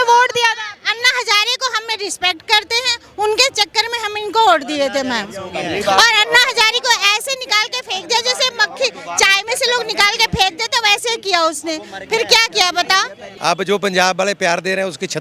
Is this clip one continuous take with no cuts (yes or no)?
no